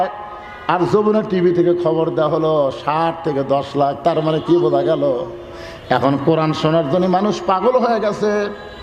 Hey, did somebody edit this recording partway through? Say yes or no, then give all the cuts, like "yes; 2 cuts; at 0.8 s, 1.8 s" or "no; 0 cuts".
no; 0 cuts